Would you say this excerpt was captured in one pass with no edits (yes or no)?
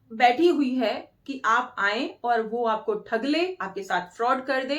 yes